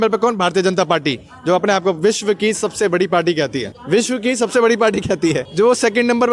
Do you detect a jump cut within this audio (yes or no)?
no